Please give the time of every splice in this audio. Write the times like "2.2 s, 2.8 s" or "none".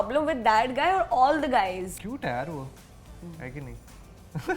1.9 s

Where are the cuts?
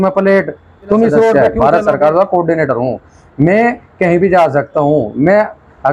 1.3 s

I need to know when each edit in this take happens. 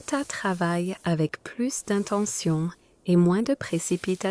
none

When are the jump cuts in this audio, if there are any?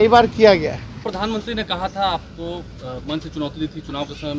1.1 s

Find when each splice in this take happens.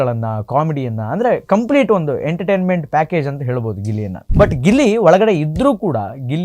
4.2 s

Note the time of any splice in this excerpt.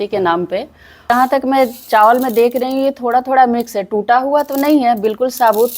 1.1 s

